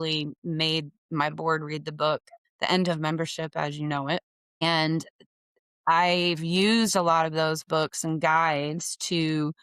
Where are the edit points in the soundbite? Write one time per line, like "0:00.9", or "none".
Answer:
0:02.4
0:04.6